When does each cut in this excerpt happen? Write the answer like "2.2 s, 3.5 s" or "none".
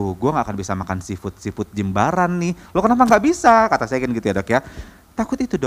none